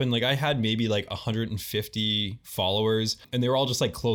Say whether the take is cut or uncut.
cut